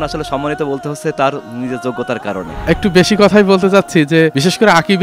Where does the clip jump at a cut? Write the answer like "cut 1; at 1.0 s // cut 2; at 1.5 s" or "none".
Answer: cut 1; at 2.6 s